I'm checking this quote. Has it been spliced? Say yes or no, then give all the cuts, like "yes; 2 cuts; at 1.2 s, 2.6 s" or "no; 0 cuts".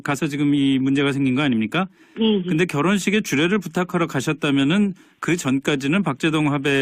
yes; 1 cut; at 1.0 s